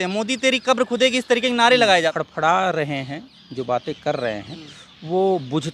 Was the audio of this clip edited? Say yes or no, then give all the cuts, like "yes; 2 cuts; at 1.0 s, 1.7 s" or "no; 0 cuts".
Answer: yes; 1 cut; at 2.2 s